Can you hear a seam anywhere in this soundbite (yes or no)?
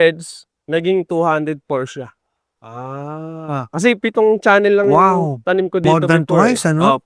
no